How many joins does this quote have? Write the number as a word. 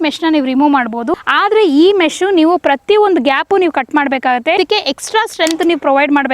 two